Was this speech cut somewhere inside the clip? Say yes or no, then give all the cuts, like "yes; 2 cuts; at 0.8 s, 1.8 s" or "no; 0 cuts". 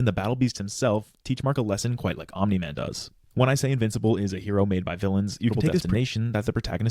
yes; 1 cut; at 5.5 s